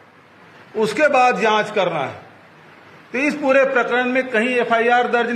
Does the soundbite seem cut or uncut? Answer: uncut